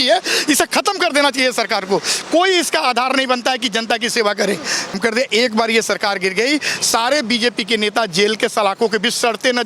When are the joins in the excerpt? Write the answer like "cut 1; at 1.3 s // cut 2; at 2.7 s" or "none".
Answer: cut 1; at 5.0 s

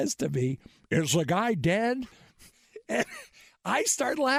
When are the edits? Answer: none

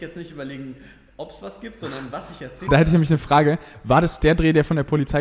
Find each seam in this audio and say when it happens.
cut 1; at 2.7 s

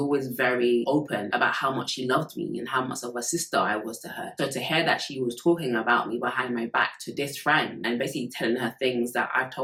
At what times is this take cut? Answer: none

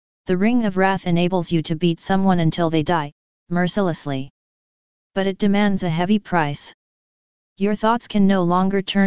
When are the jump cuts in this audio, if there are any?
cut 1; at 2.3 s

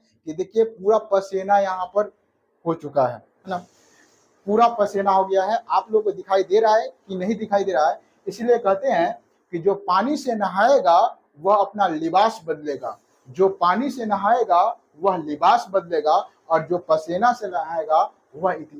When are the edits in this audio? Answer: none

